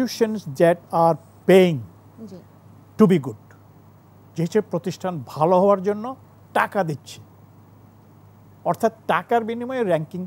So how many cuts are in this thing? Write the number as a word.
zero